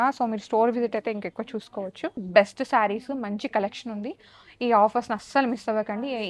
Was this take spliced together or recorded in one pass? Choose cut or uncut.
cut